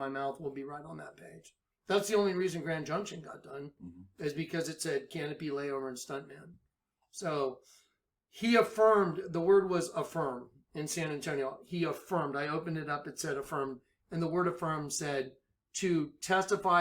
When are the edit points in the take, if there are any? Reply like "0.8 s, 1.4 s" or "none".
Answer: 5.1 s